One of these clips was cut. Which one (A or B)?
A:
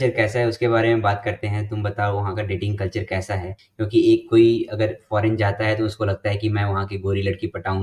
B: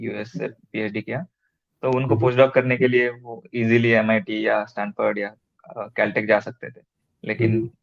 A